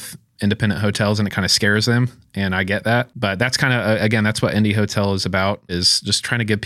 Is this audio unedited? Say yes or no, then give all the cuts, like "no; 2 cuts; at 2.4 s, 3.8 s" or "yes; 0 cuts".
no; 2 cuts; at 3.1 s, 5.7 s